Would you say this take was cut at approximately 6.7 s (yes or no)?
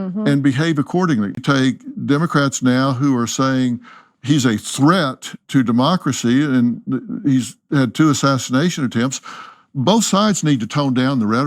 no